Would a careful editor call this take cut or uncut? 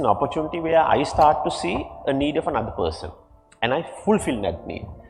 uncut